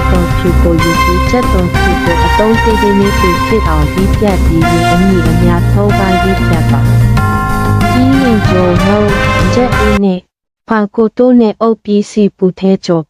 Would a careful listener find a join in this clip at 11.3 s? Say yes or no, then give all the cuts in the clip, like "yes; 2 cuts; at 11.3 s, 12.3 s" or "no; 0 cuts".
no; 0 cuts